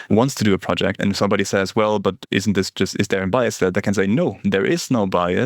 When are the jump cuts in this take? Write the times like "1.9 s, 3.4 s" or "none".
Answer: 1.0 s